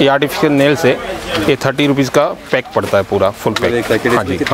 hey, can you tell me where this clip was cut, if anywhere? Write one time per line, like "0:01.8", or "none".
none